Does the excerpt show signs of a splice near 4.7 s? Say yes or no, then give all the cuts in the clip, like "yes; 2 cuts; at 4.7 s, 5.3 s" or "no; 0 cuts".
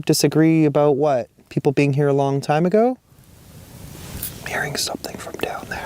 no; 2 cuts; at 1.4 s, 3.4 s